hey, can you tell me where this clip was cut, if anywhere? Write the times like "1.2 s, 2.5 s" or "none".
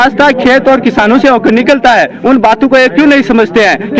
none